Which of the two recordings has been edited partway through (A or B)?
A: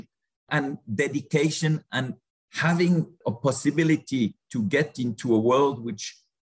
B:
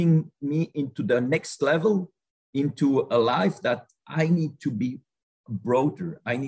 A